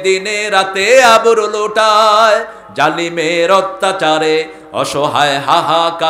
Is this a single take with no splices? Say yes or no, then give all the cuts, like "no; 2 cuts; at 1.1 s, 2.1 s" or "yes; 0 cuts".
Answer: yes; 0 cuts